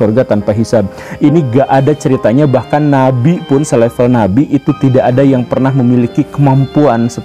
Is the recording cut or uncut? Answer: cut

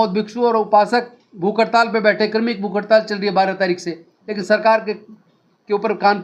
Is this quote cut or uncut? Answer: uncut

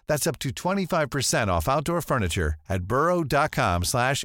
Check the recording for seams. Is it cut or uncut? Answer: uncut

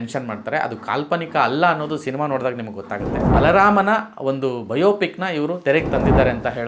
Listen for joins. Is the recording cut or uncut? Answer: cut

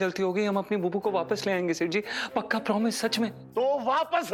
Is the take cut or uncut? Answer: uncut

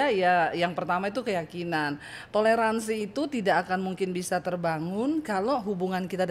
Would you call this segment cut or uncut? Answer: uncut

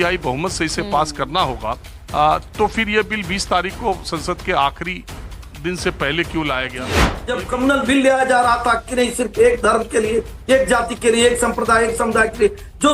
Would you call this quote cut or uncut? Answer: cut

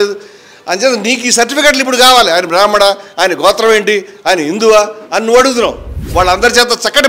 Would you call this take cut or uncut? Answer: cut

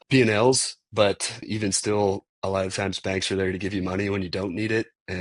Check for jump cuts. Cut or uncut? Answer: cut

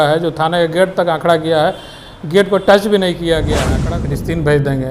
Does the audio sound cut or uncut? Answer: cut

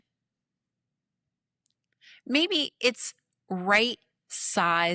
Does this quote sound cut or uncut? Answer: uncut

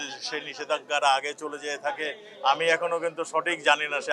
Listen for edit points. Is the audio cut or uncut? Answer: uncut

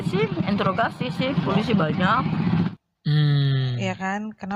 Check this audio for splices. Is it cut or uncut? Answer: cut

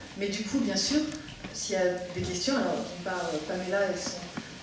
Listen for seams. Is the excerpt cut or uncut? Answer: uncut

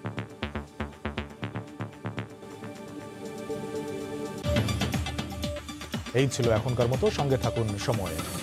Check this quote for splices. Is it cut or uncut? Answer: uncut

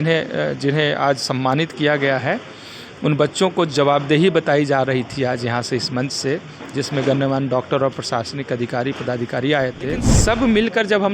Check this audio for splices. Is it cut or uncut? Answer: cut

